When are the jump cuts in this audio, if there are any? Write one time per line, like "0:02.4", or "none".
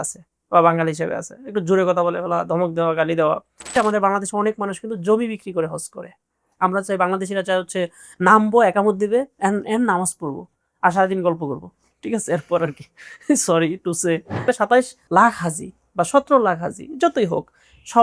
0:03.7
0:06.5
0:14.5